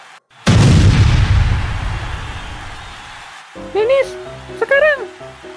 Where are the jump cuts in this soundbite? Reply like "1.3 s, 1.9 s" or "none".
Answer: none

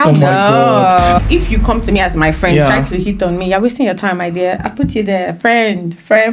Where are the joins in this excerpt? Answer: 1.2 s

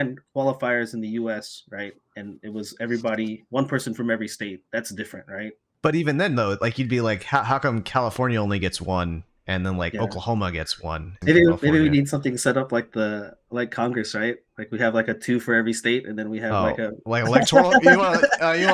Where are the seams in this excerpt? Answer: 5.6 s, 11.1 s

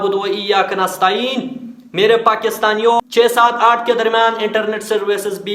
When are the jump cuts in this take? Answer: 3.0 s

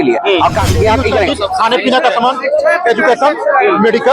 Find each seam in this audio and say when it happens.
1.3 s

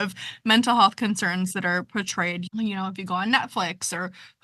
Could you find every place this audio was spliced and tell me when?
2.5 s

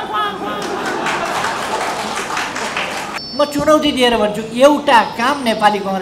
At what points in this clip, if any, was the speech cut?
3.2 s

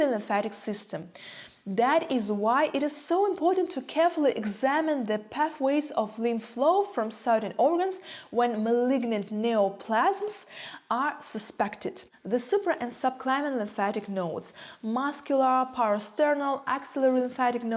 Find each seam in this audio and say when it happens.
none

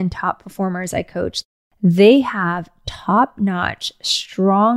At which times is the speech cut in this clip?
1.4 s

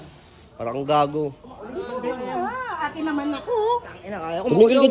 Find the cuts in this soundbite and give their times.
none

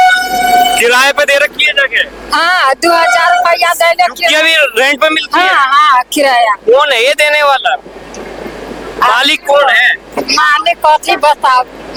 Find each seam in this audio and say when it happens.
none

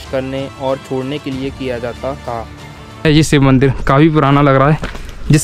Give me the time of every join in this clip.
3.0 s

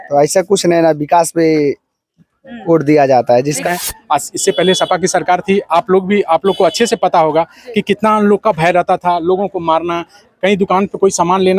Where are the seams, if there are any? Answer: 3.7 s

